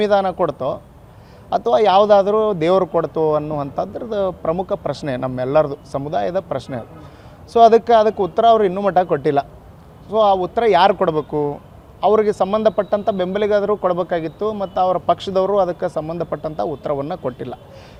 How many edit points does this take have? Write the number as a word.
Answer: zero